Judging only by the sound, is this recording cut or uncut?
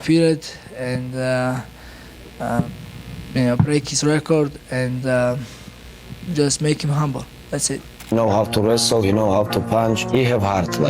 cut